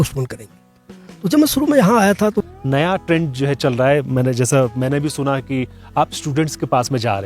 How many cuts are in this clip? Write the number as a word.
one